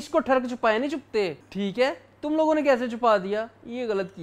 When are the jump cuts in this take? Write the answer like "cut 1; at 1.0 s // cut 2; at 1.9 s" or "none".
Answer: cut 1; at 1.4 s